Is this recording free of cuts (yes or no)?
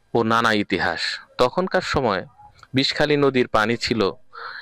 yes